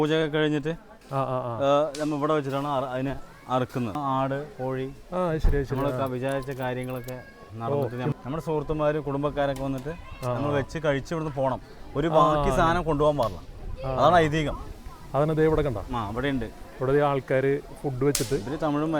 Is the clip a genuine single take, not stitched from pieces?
no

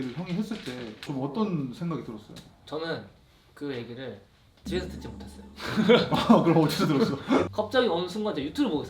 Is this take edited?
yes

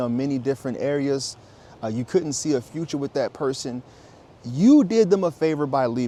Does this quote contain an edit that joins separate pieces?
no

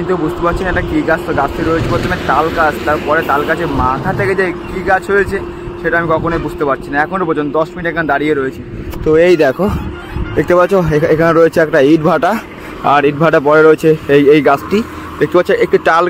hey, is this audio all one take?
yes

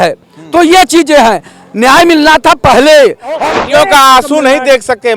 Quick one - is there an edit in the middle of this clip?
yes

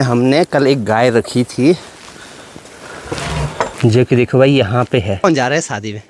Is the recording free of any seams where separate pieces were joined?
no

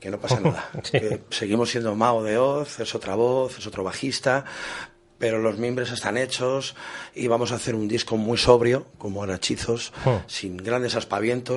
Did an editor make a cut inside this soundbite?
yes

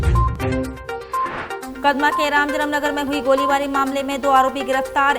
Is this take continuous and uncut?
no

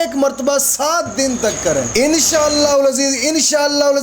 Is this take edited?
yes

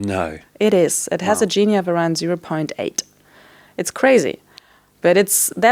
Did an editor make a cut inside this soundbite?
no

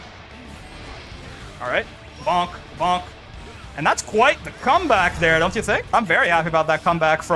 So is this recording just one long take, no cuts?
no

